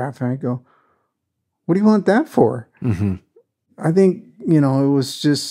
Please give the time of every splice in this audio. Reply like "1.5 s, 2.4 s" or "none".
3.6 s